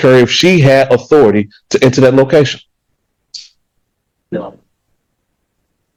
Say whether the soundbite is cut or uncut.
uncut